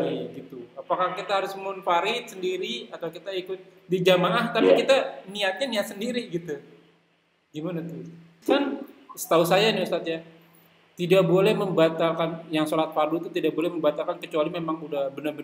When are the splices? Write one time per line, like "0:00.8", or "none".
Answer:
0:08.3